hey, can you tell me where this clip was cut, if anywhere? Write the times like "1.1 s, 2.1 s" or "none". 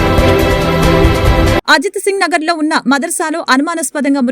1.5 s